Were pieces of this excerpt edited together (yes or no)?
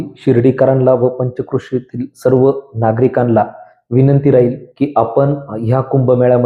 no